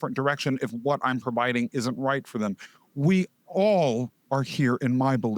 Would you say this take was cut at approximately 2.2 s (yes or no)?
no